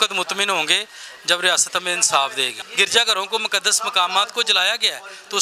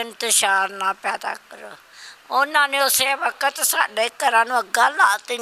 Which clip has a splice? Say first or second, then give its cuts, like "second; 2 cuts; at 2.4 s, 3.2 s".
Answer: first; 1 cut; at 2.5 s